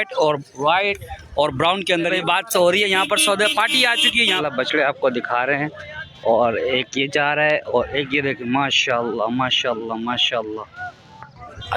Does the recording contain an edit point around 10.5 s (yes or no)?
no